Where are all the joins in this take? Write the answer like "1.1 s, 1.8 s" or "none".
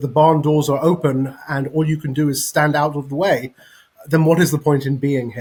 none